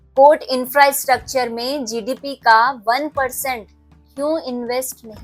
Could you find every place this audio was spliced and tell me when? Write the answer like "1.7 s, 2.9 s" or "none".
none